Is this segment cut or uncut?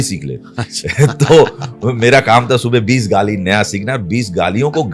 uncut